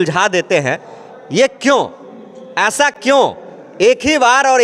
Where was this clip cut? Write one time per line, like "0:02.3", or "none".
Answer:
none